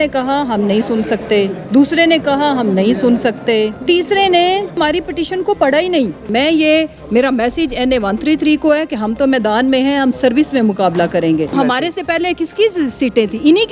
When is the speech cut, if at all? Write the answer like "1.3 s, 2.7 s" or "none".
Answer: 1.6 s, 3.8 s, 4.8 s, 6.2 s, 11.5 s